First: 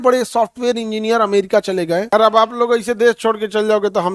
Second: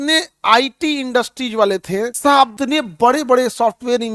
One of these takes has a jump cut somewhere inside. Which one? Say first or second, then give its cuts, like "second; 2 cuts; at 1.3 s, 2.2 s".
first; 1 cut; at 2.1 s